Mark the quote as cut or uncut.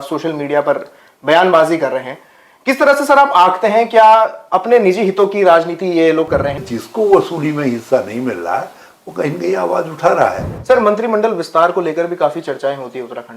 cut